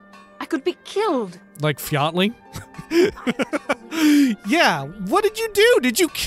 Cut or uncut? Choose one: cut